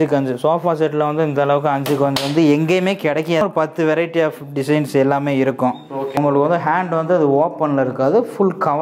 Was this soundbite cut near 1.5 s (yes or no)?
no